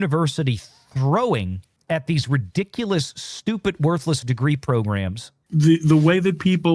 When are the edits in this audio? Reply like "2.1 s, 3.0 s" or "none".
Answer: 5.4 s